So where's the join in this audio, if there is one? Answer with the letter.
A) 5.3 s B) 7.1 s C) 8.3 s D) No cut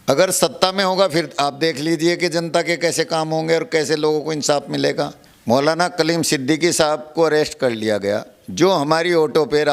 A